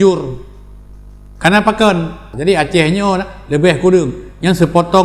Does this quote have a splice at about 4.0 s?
no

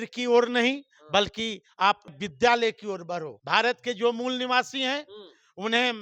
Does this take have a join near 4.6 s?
no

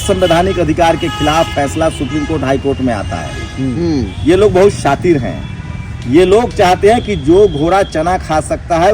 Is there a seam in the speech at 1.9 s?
no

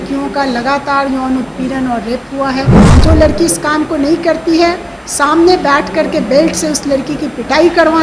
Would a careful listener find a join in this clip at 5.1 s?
no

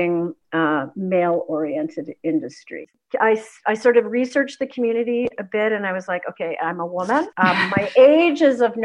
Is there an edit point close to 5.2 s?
no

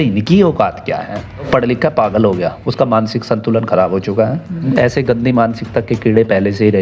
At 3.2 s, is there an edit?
no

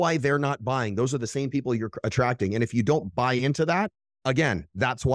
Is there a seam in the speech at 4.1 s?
yes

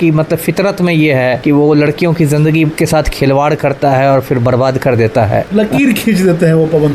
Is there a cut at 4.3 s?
no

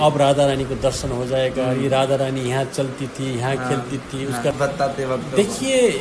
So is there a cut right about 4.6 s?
yes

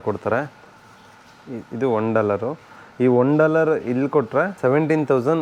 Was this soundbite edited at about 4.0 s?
no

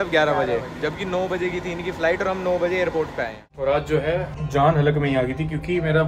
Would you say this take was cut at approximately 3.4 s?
yes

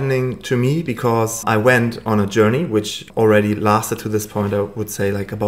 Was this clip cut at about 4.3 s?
no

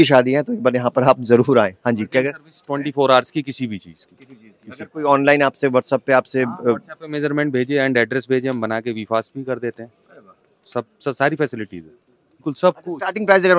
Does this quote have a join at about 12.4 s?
yes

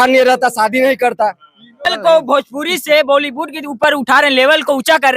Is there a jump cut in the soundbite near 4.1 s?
no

